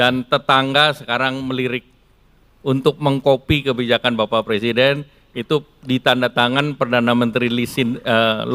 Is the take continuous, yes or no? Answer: yes